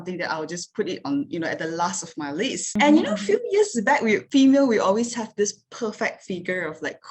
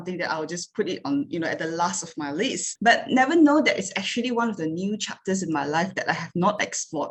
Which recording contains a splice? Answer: first; 1 cut; at 2.6 s

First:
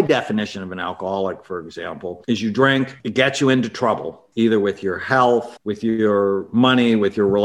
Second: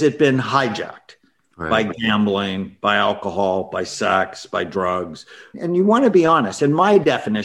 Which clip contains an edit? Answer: first; 4 cuts; at 2.2 s, 3.0 s, 4.2 s, 5.6 s

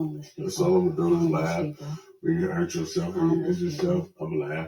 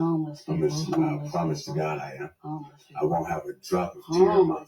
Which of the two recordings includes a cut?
second; 1 cut; at 3.8 s

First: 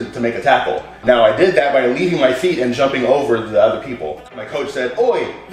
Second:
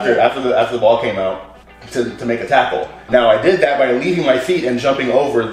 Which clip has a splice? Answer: first; 1 cut; at 4.4 s

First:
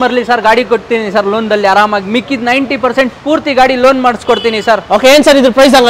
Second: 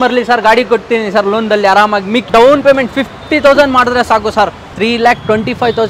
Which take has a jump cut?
second; 2 cuts; at 2.3 s, 4.8 s

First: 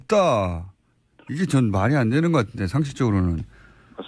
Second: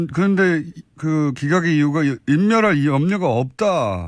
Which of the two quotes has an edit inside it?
second; 1 cut; at 2.2 s

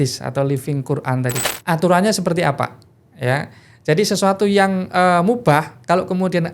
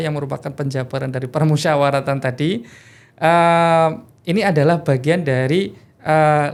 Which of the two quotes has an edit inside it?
first; 1 cut; at 1.4 s

